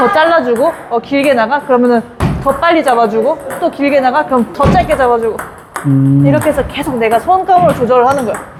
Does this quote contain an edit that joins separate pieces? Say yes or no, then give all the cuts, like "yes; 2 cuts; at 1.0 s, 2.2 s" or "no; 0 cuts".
no; 0 cuts